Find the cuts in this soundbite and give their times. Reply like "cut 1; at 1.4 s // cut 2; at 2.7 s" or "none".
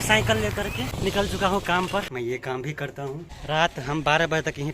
cut 1; at 0.9 s // cut 2; at 2.1 s // cut 3; at 3.3 s

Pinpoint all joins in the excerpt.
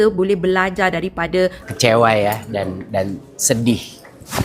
cut 1; at 1.6 s

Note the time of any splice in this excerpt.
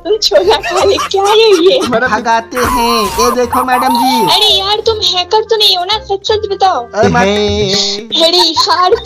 cut 1; at 2.1 s // cut 2; at 7.1 s

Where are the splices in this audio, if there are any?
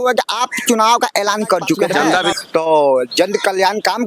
cut 1; at 2.3 s

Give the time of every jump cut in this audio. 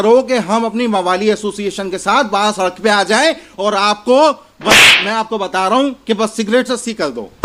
none

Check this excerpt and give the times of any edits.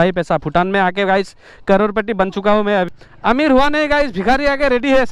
cut 1; at 2.9 s

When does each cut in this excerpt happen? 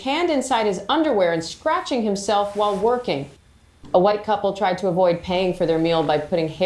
cut 1; at 3.4 s

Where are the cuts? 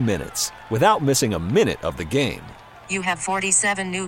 none

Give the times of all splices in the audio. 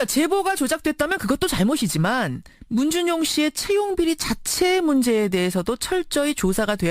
cut 1; at 1.4 s

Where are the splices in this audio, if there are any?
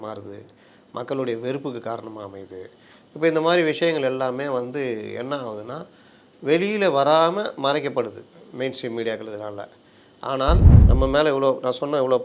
cut 1; at 10.7 s

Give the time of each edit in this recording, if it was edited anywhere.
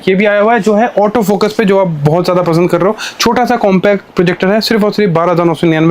none

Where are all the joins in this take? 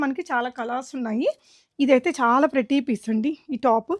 cut 1; at 1.6 s

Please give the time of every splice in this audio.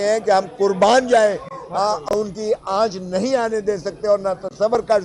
none

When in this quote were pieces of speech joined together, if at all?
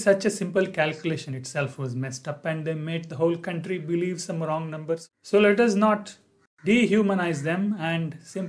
cut 1; at 5.1 s

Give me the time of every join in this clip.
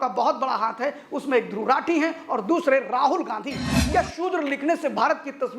cut 1; at 3.7 s

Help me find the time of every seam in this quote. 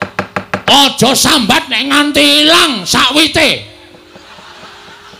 none

